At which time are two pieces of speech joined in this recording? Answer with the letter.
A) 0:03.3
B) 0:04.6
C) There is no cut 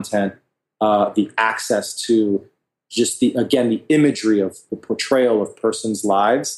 B